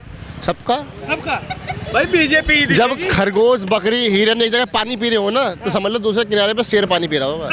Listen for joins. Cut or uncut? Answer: uncut